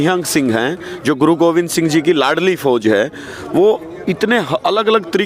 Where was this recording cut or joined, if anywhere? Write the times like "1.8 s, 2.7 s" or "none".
none